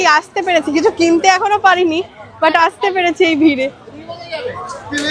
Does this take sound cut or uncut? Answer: uncut